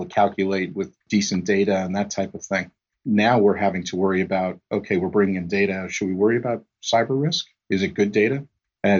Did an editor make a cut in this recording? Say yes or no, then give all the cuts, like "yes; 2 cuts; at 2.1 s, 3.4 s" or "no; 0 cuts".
yes; 1 cut; at 1.1 s